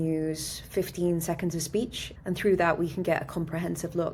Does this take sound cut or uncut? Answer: cut